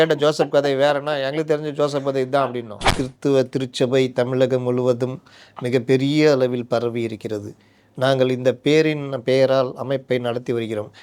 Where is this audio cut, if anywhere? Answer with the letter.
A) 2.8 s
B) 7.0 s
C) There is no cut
A